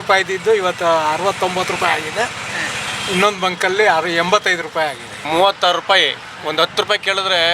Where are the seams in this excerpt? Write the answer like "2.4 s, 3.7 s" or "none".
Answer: 5.3 s